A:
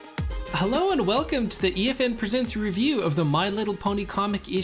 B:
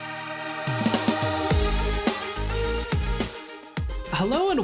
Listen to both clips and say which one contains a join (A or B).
A